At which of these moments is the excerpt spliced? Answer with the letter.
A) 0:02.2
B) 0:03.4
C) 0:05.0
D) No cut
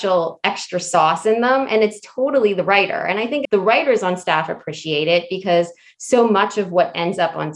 B